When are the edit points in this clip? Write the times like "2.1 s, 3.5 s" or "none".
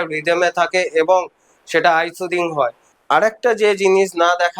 2.9 s